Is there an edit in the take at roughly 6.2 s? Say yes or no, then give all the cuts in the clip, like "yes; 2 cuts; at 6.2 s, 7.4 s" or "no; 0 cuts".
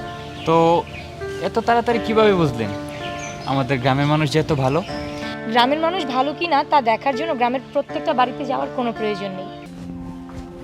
no; 1 cut; at 9.7 s